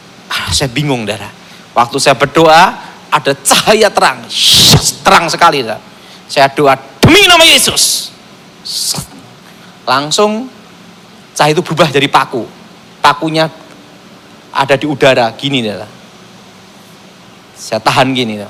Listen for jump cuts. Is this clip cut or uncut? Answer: uncut